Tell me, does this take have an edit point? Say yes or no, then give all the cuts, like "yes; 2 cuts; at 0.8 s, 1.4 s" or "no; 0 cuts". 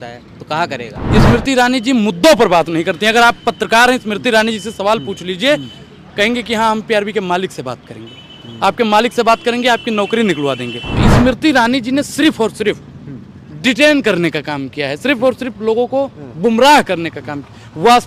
yes; 2 cuts; at 1.0 s, 11.0 s